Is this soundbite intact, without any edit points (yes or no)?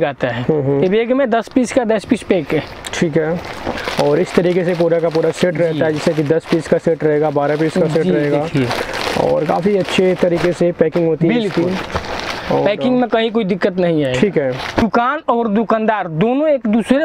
yes